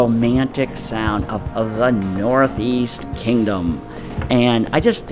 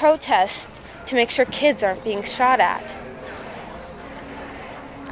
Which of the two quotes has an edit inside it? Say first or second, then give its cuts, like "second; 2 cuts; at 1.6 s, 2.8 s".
second; 1 cut; at 4.1 s